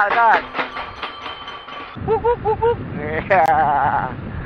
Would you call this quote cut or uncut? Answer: cut